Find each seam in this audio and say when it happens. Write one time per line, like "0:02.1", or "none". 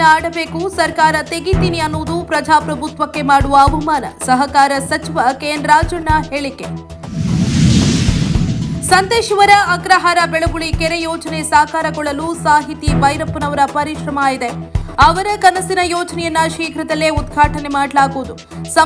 none